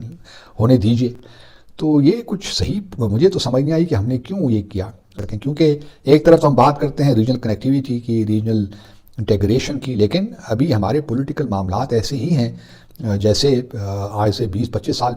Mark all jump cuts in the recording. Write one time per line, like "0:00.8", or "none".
none